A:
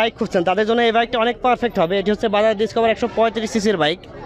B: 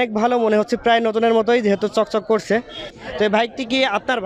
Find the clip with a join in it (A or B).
B